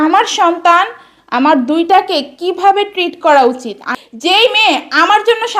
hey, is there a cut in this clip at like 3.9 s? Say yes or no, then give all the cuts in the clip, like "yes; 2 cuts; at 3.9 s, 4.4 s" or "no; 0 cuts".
yes; 1 cut; at 3.9 s